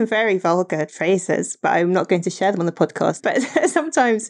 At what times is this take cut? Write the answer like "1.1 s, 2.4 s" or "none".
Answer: 0.9 s, 3.2 s

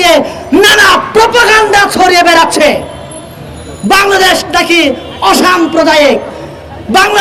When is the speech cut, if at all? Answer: none

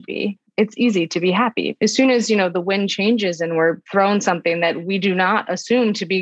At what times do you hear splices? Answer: 1.7 s, 3.8 s, 4.8 s

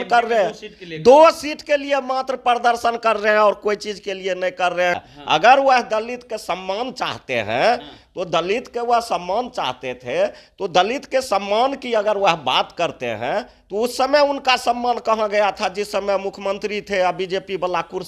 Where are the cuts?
5.0 s

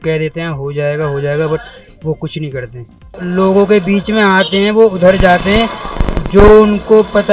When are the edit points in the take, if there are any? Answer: 3.2 s

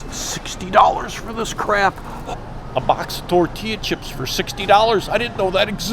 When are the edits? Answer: 2.2 s

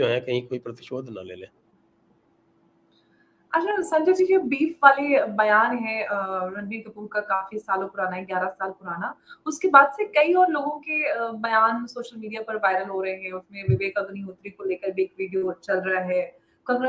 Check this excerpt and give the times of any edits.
none

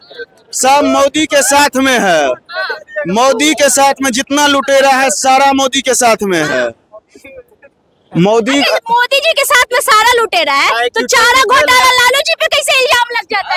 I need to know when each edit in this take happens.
none

